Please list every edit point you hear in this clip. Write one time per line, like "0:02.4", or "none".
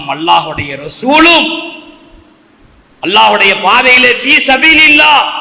none